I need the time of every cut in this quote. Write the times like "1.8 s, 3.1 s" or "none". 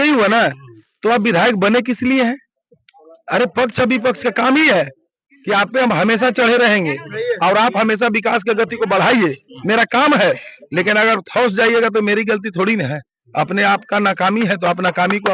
none